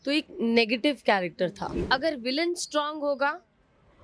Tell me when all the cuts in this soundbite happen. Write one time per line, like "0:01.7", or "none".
0:01.7